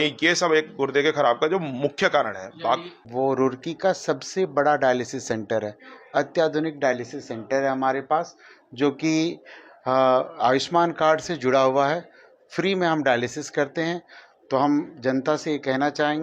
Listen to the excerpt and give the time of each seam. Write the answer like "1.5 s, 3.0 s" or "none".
3.0 s